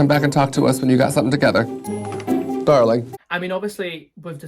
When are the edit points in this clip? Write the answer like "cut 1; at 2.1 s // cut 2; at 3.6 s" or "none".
cut 1; at 3.2 s